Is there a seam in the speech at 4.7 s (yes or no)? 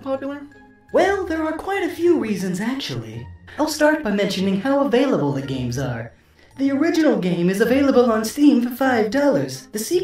yes